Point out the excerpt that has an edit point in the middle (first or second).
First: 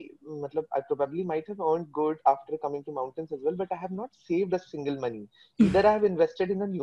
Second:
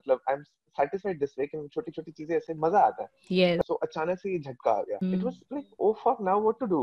second